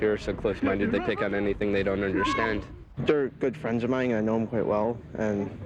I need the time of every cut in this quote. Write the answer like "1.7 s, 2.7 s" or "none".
2.8 s